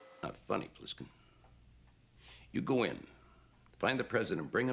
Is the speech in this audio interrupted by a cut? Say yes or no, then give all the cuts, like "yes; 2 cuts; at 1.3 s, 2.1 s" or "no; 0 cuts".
no; 0 cuts